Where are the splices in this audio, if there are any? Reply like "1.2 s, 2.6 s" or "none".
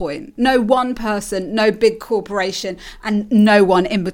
none